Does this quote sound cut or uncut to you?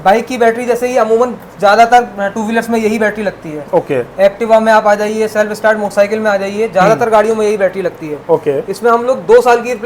uncut